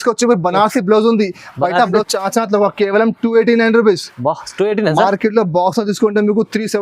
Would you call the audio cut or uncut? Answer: cut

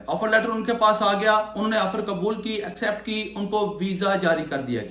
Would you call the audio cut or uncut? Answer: uncut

